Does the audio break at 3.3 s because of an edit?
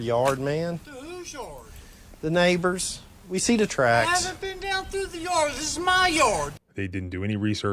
no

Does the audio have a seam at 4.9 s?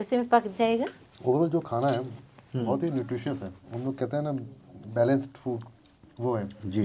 no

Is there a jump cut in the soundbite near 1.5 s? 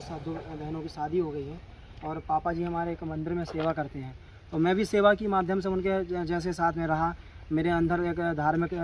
no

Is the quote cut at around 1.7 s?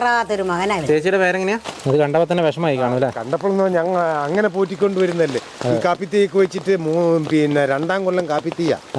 yes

